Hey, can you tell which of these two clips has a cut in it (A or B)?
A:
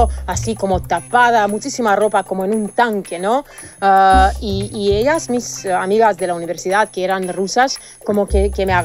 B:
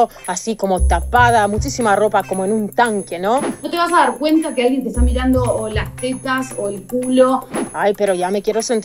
B